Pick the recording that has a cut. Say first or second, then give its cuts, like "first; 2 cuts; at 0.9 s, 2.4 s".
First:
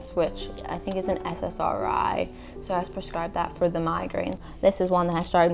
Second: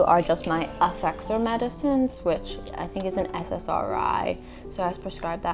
first; 1 cut; at 4.4 s